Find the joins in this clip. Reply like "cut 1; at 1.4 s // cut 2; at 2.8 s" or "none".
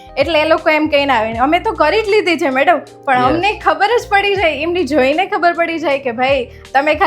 none